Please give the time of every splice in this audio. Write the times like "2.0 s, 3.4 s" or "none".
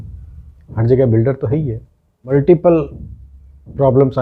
1.6 s

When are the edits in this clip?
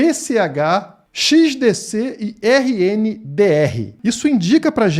3.9 s

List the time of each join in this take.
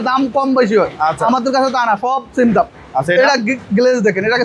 none

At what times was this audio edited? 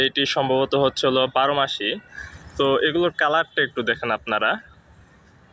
2.1 s

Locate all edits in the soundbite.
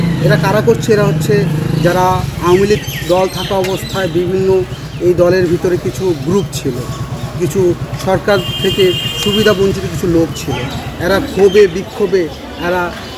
none

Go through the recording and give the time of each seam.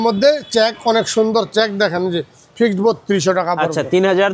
none

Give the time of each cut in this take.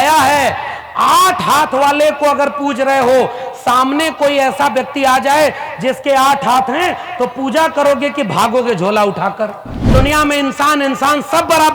9.9 s

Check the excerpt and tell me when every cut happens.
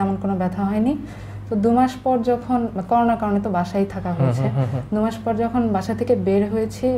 none

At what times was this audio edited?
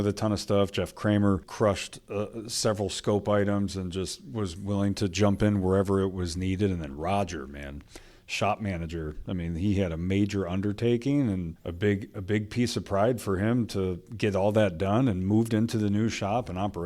1.5 s, 11.6 s

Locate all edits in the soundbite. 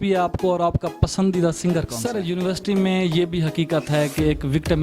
2.0 s

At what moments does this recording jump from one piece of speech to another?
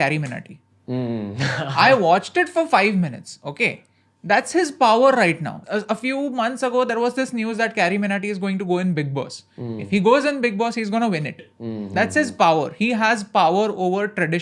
5.6 s

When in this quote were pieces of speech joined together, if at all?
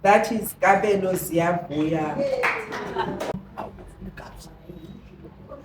3.4 s

